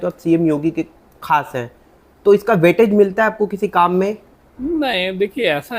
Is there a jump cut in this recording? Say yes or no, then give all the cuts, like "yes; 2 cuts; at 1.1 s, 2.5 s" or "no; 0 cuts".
no; 0 cuts